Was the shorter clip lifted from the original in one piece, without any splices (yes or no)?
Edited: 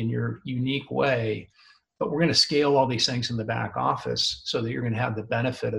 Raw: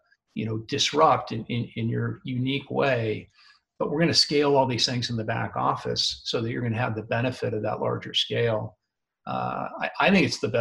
yes